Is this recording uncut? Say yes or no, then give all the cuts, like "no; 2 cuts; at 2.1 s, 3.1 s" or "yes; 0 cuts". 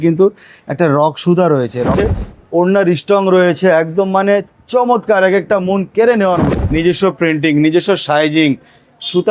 no; 2 cuts; at 2.1 s, 6.5 s